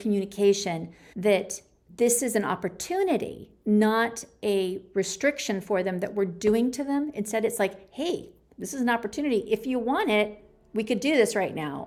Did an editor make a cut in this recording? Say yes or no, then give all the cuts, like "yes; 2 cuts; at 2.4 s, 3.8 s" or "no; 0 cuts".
no; 0 cuts